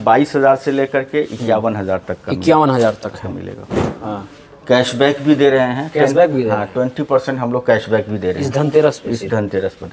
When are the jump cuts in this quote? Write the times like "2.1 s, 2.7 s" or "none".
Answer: 4.0 s